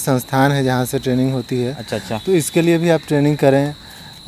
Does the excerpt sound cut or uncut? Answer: uncut